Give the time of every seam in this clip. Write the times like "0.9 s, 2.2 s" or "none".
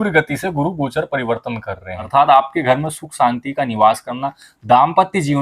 2.1 s